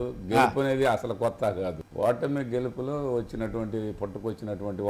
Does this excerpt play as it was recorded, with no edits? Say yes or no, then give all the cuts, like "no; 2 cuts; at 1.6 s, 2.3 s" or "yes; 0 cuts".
no; 1 cut; at 1.8 s